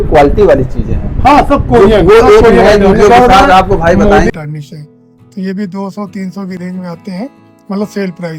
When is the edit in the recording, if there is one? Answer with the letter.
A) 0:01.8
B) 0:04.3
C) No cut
B